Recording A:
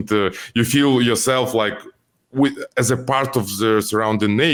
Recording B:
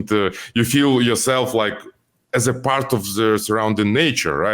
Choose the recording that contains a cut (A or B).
B